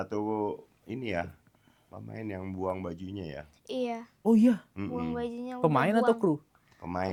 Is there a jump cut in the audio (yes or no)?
no